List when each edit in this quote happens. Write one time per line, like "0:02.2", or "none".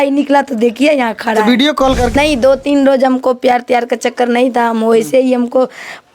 0:02.2